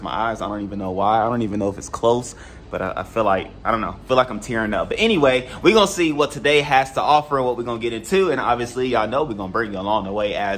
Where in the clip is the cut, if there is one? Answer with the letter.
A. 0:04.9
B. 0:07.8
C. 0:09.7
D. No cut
D